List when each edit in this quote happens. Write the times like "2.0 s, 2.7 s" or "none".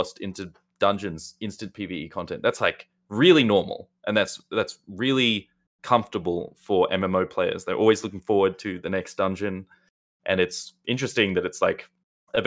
none